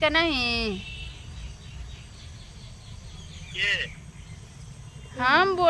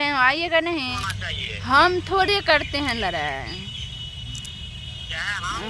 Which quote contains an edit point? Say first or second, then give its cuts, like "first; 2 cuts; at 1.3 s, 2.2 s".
second; 1 cut; at 1.0 s